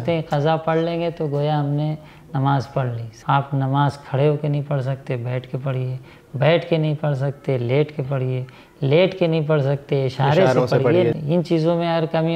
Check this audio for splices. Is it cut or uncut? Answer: cut